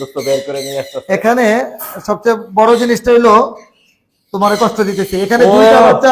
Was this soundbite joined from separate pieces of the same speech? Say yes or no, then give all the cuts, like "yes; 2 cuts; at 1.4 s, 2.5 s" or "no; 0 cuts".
no; 0 cuts